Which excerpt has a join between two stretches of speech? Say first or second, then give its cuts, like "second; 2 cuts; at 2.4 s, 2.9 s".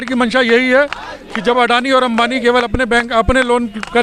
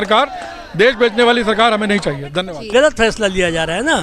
second; 1 cut; at 2.7 s